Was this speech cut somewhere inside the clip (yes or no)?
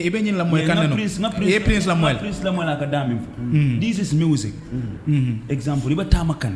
no